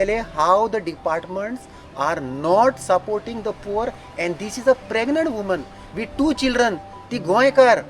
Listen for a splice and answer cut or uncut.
uncut